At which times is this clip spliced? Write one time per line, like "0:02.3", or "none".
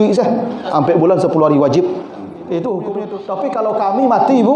0:03.2